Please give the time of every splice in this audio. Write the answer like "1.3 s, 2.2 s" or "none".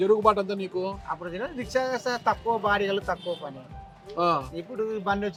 none